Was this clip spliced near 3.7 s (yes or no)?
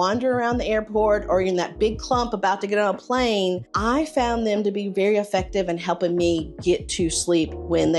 yes